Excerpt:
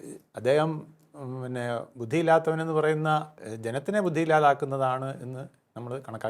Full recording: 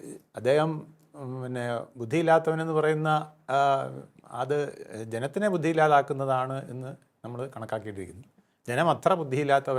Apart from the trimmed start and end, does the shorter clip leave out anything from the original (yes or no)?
yes